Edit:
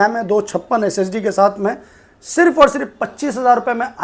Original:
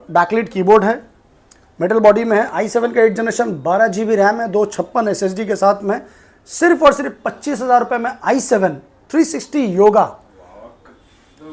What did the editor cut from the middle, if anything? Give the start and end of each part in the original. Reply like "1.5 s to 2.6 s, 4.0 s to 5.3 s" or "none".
none